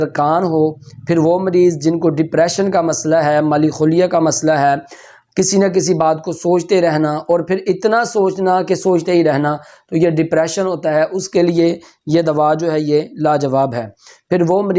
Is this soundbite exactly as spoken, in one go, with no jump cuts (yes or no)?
yes